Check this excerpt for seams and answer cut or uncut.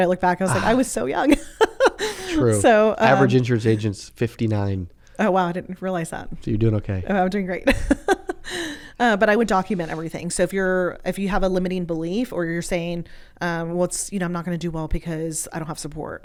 uncut